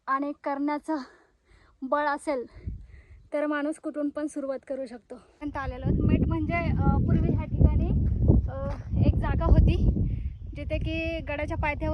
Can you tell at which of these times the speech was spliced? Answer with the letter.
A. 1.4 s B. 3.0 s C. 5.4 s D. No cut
C